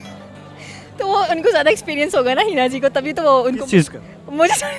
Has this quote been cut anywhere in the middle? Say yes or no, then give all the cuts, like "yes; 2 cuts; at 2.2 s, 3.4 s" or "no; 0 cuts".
no; 0 cuts